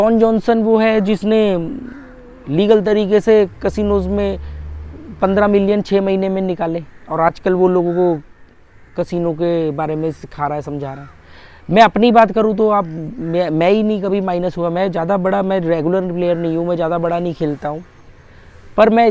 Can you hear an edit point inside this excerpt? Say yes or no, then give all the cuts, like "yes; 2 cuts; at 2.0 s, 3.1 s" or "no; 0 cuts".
no; 0 cuts